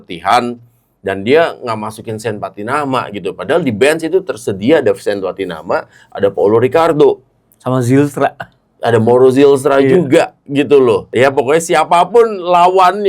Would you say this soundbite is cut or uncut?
cut